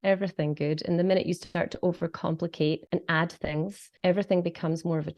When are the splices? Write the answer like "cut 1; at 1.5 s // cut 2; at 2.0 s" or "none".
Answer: cut 1; at 2.8 s // cut 2; at 3.8 s